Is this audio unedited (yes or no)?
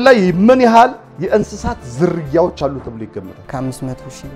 no